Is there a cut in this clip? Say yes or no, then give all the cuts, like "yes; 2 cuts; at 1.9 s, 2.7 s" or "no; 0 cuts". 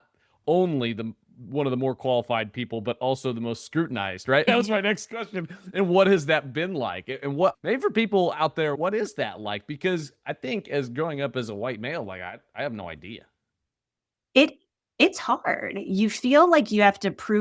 yes; 3 cuts; at 4.4 s, 7.5 s, 8.8 s